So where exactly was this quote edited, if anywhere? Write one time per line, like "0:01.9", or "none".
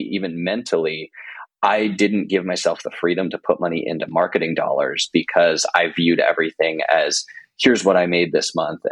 none